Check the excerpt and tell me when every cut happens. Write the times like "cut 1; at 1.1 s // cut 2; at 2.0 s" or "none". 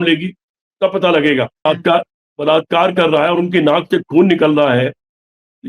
cut 1; at 1.7 s